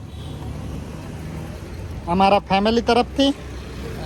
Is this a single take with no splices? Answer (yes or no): yes